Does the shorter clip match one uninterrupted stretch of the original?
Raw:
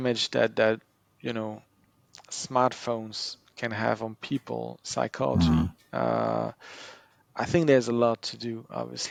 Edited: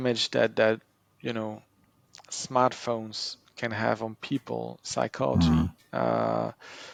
yes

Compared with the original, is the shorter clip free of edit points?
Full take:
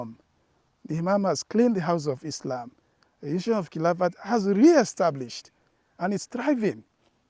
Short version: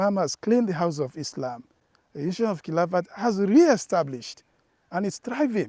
yes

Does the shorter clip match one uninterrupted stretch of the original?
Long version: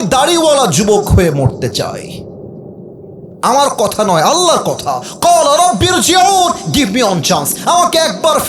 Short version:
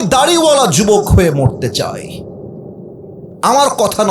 yes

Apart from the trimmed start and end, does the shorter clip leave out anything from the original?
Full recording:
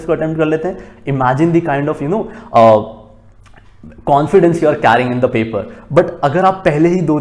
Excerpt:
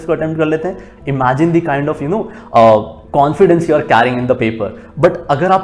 yes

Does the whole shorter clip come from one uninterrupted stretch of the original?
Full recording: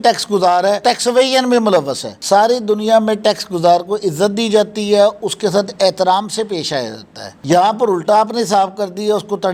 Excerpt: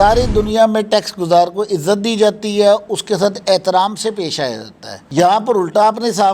yes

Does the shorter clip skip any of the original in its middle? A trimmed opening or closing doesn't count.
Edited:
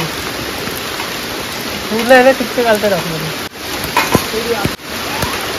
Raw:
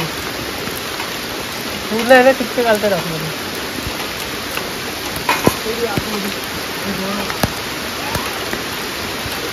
yes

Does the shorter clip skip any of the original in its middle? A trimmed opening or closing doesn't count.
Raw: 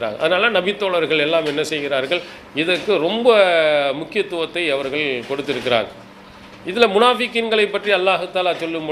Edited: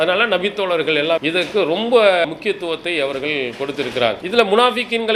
yes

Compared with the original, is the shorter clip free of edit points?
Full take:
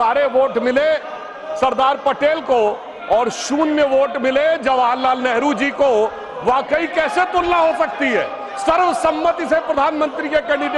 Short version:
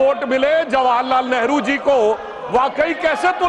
yes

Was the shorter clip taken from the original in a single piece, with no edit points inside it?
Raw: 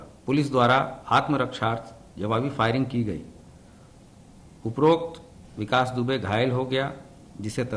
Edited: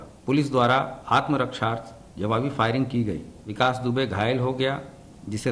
no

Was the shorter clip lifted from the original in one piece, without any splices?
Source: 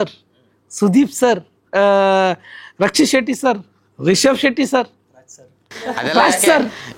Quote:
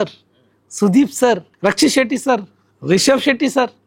no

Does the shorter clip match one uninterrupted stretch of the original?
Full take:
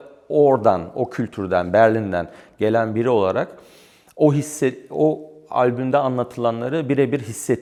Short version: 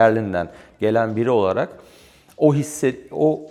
yes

